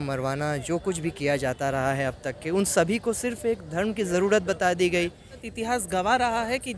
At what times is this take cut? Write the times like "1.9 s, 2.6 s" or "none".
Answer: 5.5 s